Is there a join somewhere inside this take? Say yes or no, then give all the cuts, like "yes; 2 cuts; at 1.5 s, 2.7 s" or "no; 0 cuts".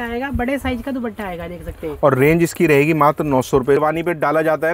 yes; 1 cut; at 3.8 s